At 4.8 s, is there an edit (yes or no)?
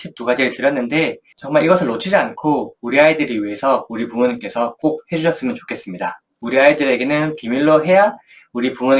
no